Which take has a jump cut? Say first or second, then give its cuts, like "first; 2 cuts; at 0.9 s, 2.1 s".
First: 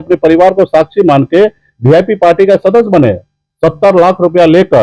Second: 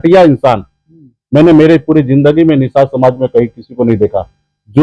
first; 1 cut; at 3.3 s